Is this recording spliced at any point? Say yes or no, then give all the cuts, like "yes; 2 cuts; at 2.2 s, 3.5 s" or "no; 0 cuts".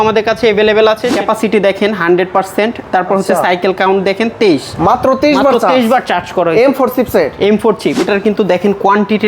yes; 2 cuts; at 1.1 s, 8.0 s